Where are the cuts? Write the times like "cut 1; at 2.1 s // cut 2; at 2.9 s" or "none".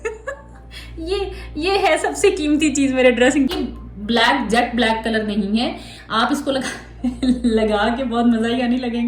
cut 1; at 3.5 s

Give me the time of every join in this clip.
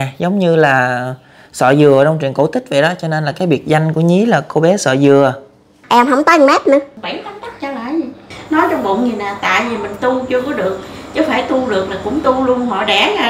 cut 1; at 5.8 s // cut 2; at 6.9 s // cut 3; at 8.3 s

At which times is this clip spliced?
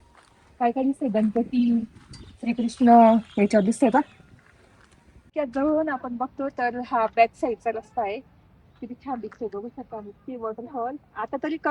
cut 1; at 5.2 s

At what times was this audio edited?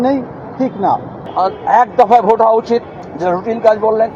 cut 1; at 1.0 s // cut 2; at 3.0 s

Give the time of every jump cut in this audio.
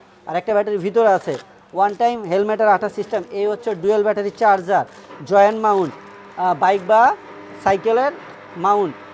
none

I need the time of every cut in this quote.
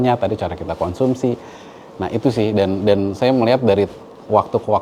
none

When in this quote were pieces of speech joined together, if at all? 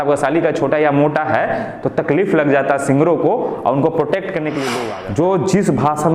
cut 1; at 4.9 s

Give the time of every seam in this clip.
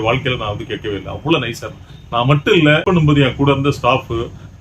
cut 1; at 2.8 s

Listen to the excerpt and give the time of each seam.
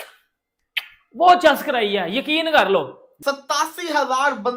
cut 1; at 3.2 s

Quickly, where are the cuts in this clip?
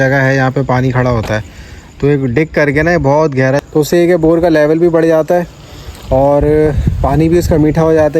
cut 1; at 3.6 s

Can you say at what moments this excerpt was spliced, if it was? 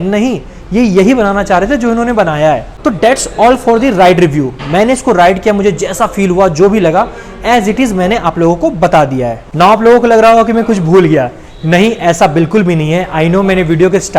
none

